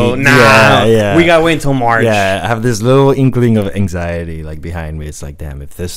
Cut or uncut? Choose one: uncut